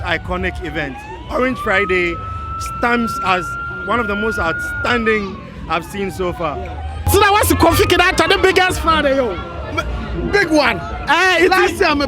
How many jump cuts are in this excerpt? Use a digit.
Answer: 1